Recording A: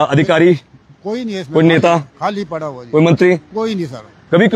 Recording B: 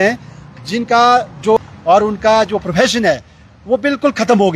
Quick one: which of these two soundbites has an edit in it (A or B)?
B